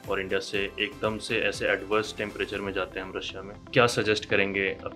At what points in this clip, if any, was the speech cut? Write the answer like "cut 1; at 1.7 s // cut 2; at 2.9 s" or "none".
cut 1; at 3.7 s